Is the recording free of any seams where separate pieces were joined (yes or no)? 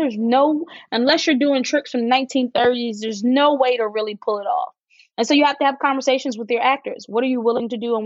yes